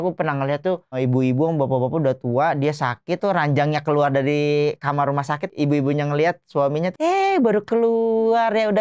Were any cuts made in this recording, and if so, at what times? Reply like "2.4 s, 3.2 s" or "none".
3.2 s, 5.4 s, 6.9 s